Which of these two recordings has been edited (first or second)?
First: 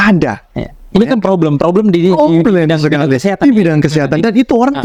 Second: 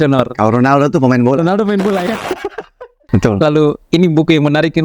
second